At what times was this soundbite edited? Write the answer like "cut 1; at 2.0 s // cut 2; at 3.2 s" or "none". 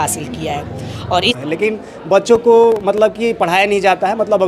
cut 1; at 1.4 s